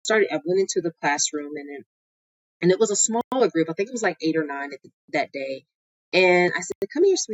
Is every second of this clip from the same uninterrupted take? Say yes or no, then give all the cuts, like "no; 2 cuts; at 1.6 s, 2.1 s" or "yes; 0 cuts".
yes; 0 cuts